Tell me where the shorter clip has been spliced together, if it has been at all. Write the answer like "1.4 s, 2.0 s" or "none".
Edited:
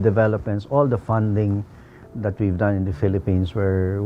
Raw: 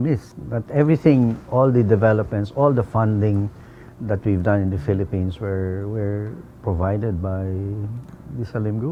none